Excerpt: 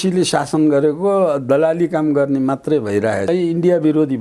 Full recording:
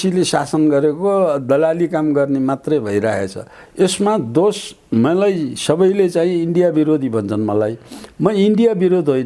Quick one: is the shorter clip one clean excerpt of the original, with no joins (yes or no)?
no